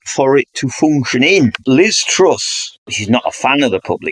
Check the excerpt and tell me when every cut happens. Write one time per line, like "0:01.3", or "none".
0:01.6
0:02.9